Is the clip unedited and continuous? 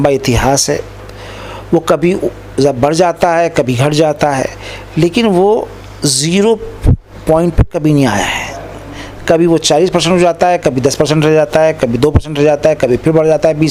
yes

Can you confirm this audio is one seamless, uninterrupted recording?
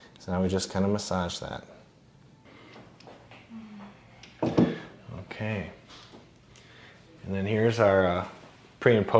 no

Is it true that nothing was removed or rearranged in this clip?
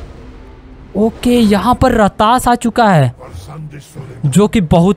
yes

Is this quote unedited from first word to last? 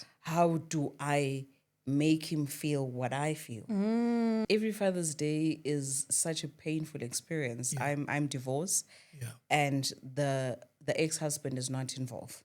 no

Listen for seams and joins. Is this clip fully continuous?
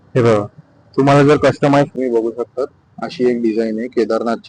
no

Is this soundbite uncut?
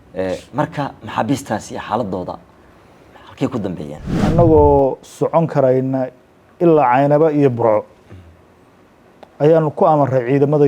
no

